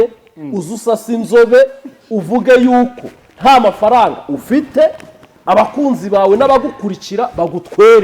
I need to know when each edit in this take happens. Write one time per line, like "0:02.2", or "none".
none